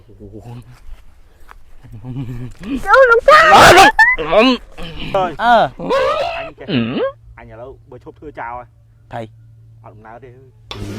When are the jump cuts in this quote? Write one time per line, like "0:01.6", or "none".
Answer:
0:05.1
0:05.8
0:07.3